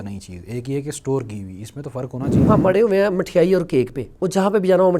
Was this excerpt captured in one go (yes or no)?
no